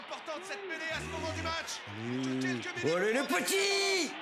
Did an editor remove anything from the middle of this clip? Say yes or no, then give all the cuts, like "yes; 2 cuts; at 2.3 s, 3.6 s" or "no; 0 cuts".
no; 0 cuts